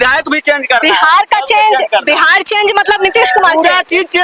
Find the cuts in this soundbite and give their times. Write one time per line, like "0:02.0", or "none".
none